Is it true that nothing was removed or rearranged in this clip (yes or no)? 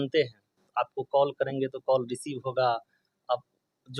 yes